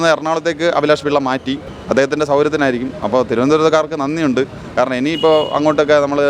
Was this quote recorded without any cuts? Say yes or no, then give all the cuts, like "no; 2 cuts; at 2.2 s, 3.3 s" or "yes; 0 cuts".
no; 1 cut; at 1.7 s